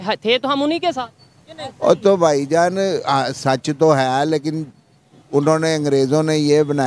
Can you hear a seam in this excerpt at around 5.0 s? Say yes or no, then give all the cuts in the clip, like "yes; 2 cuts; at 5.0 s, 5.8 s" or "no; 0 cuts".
no; 0 cuts